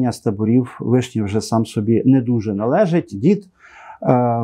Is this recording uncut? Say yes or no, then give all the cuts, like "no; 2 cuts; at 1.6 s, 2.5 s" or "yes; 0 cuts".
no; 1 cut; at 3.1 s